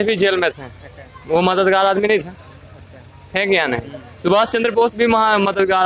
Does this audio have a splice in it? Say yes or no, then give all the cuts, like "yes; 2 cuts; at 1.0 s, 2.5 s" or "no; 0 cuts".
no; 0 cuts